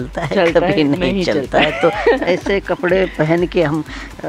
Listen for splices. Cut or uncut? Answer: uncut